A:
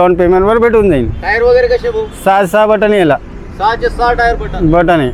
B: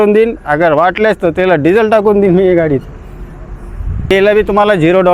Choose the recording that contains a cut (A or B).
B